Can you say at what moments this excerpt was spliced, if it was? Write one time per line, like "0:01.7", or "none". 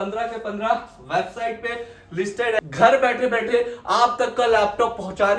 0:02.6